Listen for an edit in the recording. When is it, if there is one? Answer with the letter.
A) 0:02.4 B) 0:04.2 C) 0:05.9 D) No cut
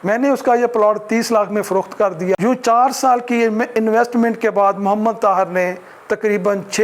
A